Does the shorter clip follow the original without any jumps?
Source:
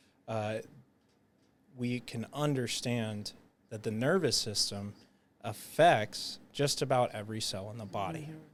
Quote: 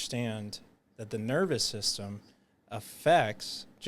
yes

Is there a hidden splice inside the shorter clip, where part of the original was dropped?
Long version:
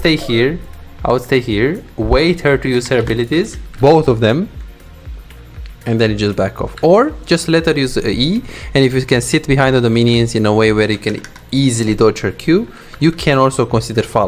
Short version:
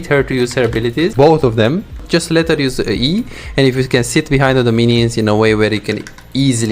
yes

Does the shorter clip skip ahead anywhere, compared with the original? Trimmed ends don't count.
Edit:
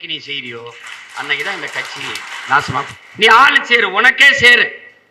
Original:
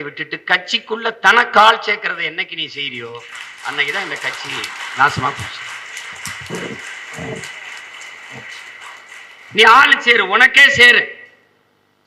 yes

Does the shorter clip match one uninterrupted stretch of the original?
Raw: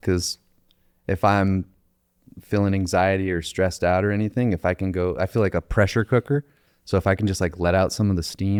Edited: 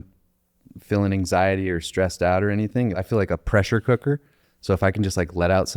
no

